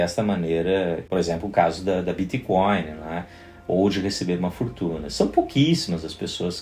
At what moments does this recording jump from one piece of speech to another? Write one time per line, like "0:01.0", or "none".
0:01.0